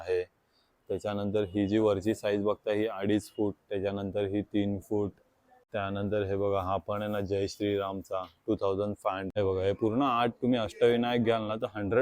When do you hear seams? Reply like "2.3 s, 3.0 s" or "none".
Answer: 5.7 s, 9.3 s